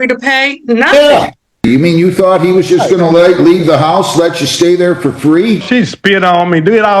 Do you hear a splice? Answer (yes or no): yes